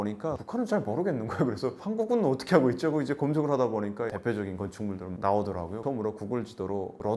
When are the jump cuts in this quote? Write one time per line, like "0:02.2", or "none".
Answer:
0:05.8